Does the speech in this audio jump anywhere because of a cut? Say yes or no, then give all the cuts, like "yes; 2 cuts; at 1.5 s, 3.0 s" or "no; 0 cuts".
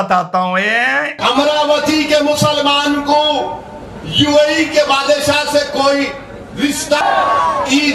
no; 0 cuts